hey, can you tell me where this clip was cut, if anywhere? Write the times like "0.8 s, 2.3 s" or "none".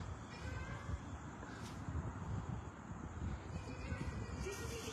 none

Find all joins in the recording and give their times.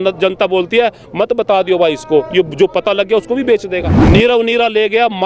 3.9 s

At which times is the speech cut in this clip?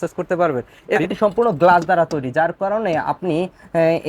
1.0 s

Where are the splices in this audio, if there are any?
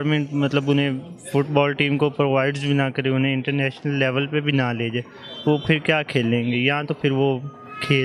none

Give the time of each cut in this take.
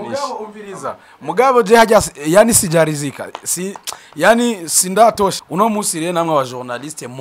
5.4 s

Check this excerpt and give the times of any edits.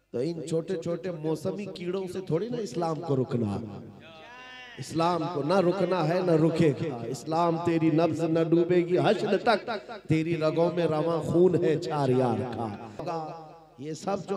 13.0 s

